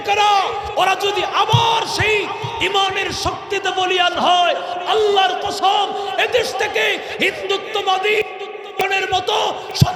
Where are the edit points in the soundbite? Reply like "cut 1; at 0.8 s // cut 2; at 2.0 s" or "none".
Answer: none